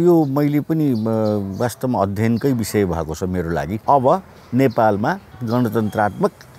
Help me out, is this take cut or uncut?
cut